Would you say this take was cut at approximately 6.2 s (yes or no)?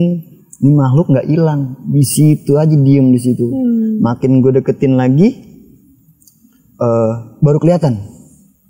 no